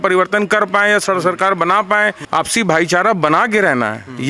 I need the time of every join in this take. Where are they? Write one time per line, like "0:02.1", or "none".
0:02.2